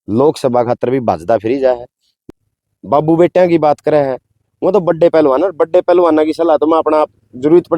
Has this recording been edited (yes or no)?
yes